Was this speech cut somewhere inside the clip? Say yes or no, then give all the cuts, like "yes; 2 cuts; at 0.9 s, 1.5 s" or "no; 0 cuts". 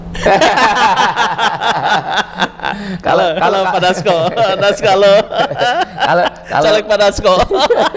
no; 0 cuts